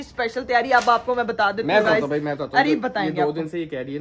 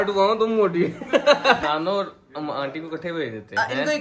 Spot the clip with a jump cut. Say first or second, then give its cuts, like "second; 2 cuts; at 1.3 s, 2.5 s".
second; 1 cut; at 1.6 s